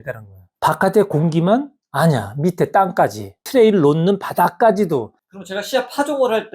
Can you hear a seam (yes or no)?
yes